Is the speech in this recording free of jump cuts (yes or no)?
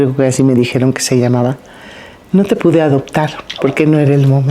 yes